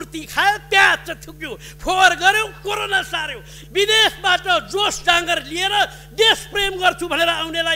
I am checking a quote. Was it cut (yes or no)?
yes